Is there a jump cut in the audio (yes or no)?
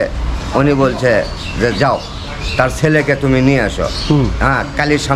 no